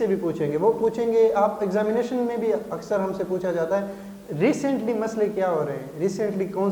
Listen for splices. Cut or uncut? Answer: uncut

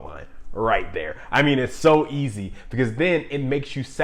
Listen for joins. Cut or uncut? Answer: uncut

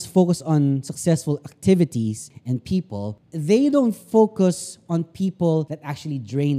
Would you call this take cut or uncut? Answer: cut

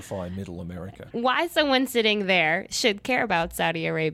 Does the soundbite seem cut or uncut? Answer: cut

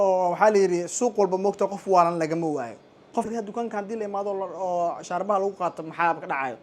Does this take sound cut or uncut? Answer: cut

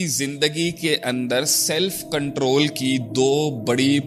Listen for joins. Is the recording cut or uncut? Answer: uncut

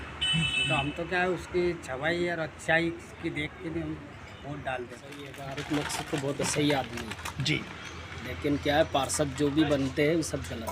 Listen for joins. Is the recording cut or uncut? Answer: cut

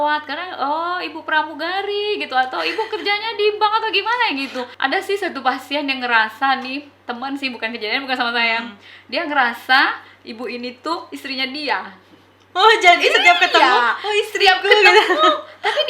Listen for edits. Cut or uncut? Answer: cut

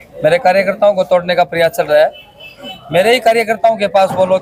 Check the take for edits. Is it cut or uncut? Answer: uncut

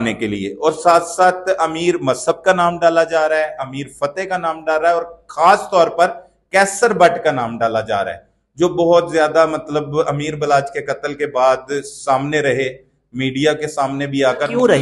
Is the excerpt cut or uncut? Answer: uncut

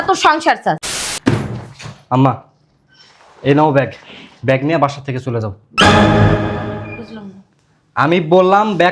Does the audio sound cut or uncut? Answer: cut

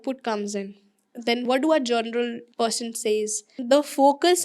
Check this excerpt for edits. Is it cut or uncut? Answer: cut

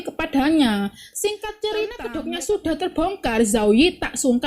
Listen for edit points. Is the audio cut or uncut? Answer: cut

